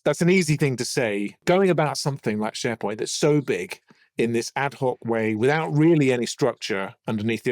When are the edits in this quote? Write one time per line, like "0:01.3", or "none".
0:01.4